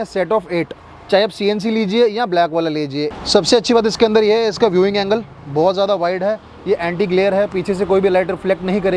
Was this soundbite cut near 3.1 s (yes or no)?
yes